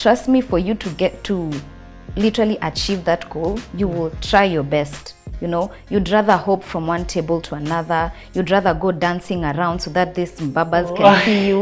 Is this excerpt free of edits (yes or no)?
yes